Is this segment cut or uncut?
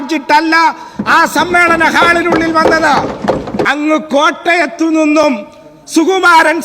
cut